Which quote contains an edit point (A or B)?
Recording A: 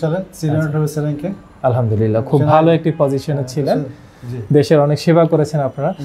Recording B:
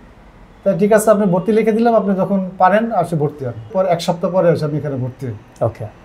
B